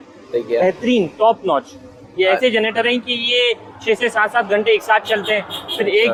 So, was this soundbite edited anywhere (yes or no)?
no